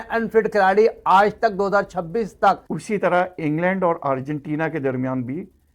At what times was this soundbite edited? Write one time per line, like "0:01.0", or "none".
0:02.7